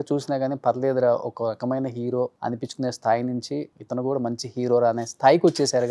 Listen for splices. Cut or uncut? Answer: cut